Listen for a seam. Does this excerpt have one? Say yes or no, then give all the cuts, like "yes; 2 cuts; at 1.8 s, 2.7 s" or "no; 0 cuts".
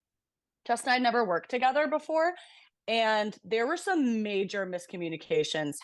no; 0 cuts